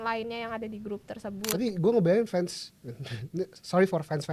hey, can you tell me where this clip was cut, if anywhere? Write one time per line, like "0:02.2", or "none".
0:01.5